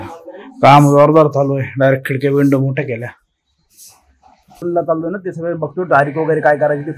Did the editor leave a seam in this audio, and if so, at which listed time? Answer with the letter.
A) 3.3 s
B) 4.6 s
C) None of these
B